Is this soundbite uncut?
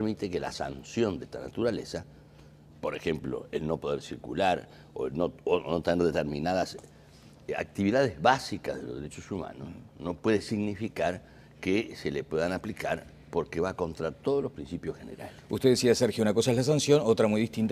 no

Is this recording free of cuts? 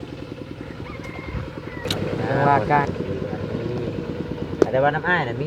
no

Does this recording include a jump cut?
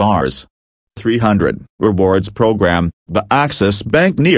yes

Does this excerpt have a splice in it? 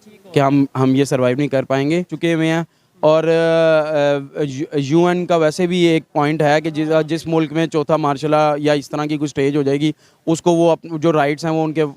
yes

